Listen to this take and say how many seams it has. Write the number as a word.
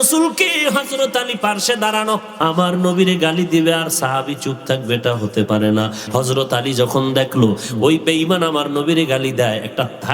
two